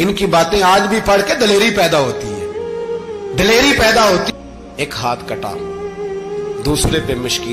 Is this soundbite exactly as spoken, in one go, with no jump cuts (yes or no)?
no